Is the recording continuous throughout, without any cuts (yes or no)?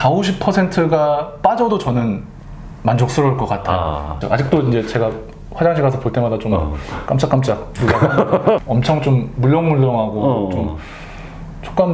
no